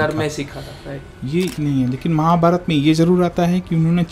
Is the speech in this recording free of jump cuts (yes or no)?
no